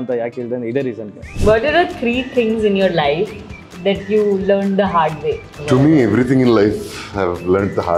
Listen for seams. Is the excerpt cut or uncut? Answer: cut